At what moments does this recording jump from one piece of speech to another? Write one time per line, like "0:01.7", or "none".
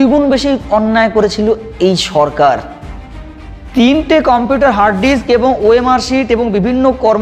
none